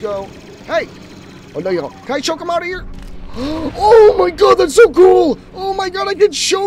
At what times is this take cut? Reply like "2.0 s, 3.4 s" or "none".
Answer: none

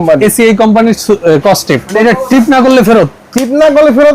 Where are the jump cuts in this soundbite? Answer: 1.9 s

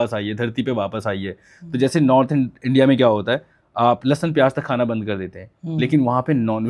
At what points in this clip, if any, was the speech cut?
none

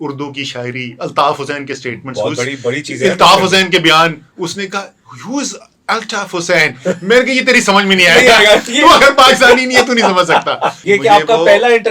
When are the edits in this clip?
10.8 s

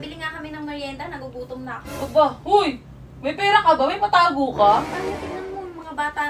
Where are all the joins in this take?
4.9 s

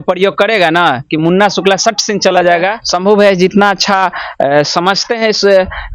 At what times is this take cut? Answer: 2.8 s

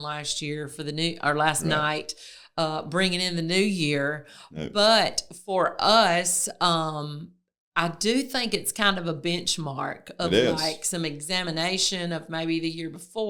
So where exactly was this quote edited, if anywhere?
none

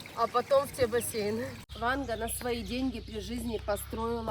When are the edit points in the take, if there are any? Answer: 1.6 s

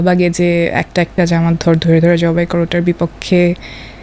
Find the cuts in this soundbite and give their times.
none

